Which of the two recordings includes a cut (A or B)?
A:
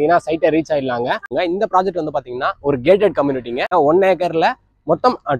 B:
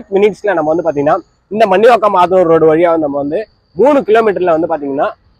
A